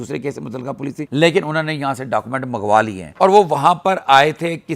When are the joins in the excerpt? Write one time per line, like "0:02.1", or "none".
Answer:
0:03.0